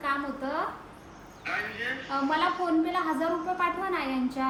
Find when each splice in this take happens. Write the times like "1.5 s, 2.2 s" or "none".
none